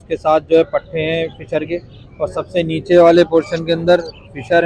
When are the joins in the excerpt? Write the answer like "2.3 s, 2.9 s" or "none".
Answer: none

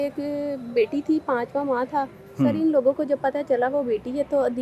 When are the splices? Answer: 2.2 s

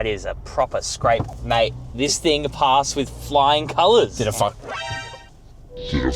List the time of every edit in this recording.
1.3 s

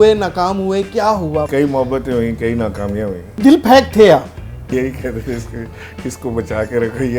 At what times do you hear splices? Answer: 1.5 s, 3.4 s, 4.7 s

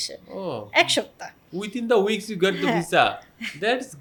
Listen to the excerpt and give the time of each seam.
none

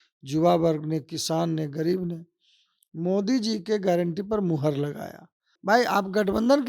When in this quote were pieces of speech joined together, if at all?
5.5 s

